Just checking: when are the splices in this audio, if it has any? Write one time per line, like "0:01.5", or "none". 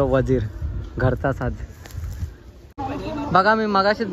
0:02.7

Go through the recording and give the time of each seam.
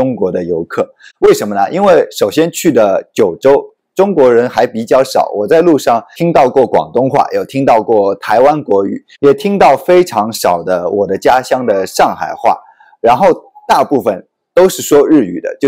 none

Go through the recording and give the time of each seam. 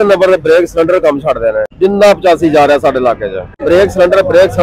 0:01.7
0:03.6

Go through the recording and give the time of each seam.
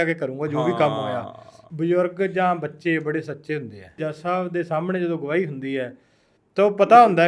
0:01.5
0:04.1

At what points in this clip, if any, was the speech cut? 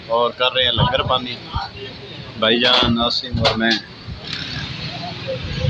0:04.3

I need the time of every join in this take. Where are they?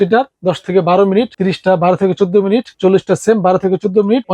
0:01.3

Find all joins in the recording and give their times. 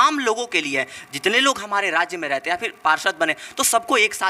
none

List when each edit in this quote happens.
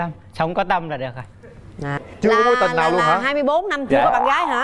0:02.0

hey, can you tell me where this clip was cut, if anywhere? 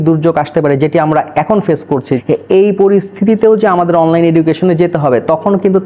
0:02.2

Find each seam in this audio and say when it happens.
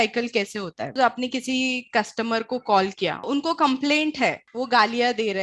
0:00.9
0:04.5

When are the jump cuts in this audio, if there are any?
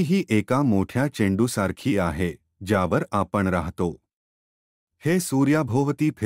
none

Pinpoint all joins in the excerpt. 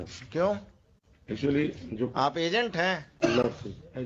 none

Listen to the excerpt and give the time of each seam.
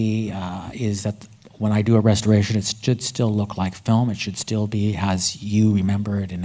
none

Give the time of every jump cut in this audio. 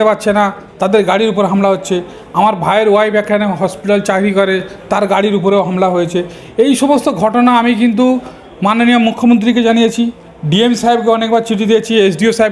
none

